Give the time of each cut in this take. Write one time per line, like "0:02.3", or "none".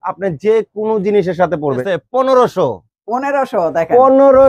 0:01.8